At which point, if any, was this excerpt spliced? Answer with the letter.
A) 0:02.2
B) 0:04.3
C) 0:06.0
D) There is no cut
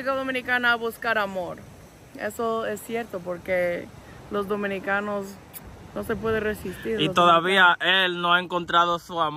D